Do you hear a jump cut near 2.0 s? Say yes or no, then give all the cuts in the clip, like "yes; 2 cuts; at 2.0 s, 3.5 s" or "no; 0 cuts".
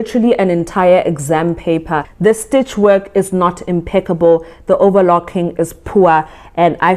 yes; 1 cut; at 2.0 s